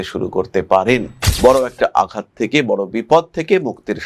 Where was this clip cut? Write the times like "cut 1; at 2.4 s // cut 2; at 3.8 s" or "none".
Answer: cut 1; at 1.1 s